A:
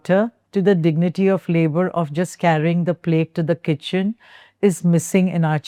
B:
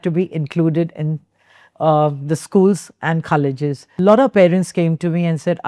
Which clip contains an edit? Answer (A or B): B